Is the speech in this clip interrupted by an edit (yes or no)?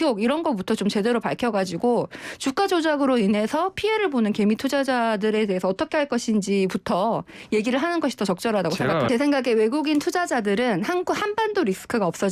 yes